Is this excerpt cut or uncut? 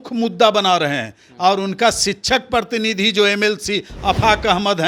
uncut